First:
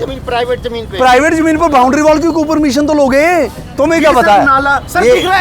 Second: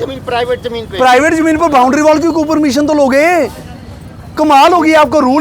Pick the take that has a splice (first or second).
first